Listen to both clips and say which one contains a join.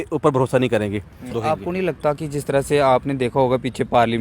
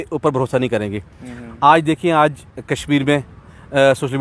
first; 1 cut; at 1.3 s

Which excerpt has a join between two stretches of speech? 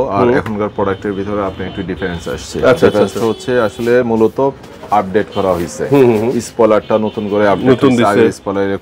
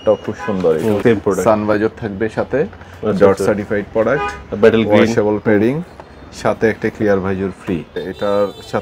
second; 2 cuts; at 1.0 s, 7.9 s

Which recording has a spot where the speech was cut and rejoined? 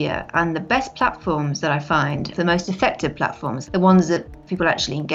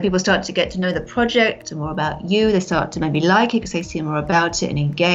first; 2 cuts; at 2.3 s, 3.5 s

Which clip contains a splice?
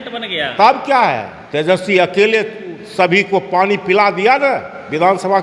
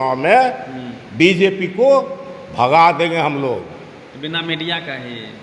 first; 1 cut; at 1.4 s

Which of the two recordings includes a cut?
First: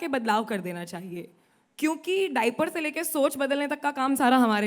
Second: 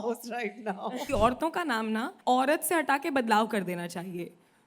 second; 2 cuts; at 1.1 s, 2.1 s

